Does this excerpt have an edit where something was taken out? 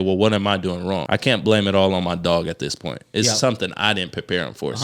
yes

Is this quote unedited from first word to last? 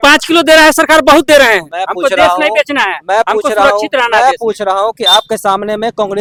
yes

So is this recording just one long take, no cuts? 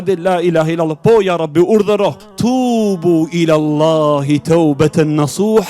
no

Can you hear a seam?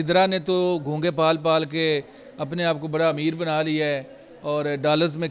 no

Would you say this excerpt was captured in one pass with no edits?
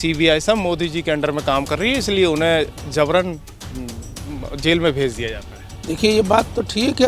yes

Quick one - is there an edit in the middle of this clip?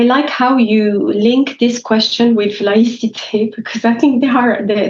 no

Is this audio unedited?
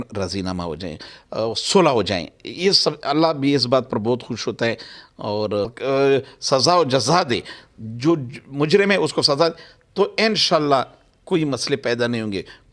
no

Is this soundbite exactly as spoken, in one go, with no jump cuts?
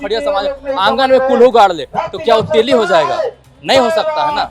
yes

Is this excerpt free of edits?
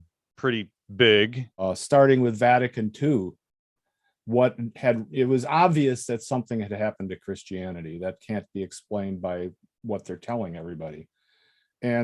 no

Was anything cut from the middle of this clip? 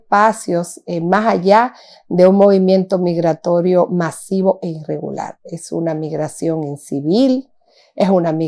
no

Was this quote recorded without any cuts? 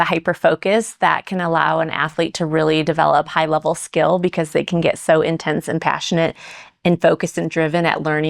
yes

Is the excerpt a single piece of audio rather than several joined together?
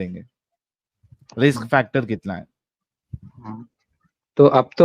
no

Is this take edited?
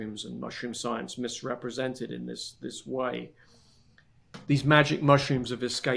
yes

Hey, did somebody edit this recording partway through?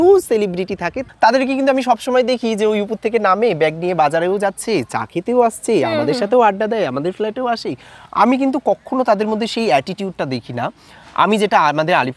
yes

